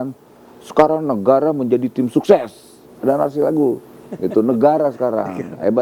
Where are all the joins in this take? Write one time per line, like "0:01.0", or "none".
none